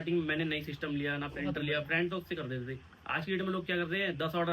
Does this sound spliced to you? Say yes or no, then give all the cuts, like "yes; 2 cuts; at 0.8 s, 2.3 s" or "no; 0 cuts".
no; 0 cuts